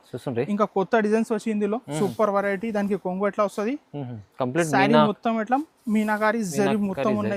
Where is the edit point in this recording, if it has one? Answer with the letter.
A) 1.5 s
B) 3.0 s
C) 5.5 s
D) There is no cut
D